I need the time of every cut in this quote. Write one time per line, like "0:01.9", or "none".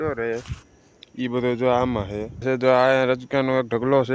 0:02.4